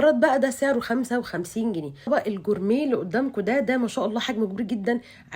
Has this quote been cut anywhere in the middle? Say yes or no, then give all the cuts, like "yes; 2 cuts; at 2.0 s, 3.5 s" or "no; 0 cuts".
yes; 1 cut; at 2.1 s